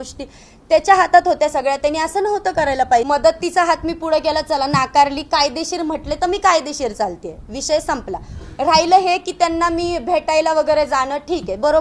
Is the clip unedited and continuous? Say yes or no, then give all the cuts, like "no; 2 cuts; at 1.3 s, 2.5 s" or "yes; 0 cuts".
no; 1 cut; at 3.0 s